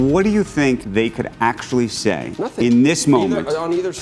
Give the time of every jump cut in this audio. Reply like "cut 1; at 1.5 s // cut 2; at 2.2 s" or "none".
cut 1; at 0.9 s // cut 2; at 2.4 s